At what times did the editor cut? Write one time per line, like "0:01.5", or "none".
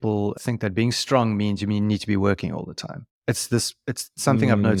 none